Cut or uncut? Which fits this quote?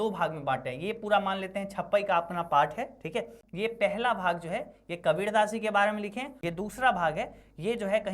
cut